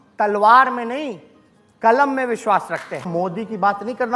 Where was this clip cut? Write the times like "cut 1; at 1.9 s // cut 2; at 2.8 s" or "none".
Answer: cut 1; at 3.1 s

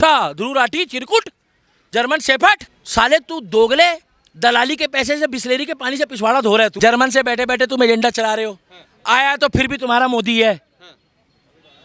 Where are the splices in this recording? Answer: cut 1; at 2.8 s // cut 2; at 6.7 s

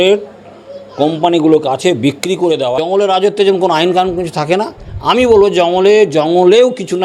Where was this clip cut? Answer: cut 1; at 2.7 s

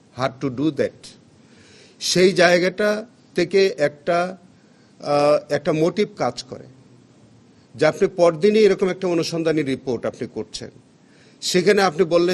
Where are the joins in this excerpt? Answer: none

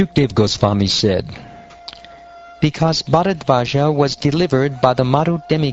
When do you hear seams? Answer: cut 1; at 3.4 s

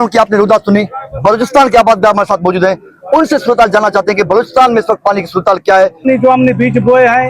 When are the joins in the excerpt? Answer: cut 1; at 6.0 s

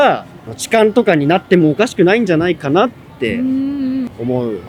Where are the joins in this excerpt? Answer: none

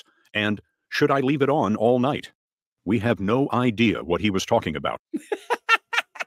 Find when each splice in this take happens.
none

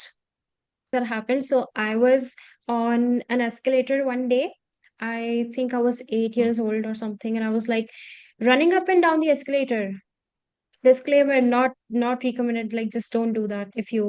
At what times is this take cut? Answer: cut 1; at 0.9 s

